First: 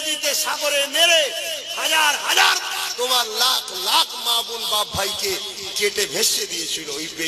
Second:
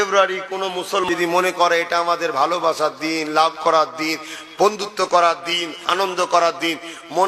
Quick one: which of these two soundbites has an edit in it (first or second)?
second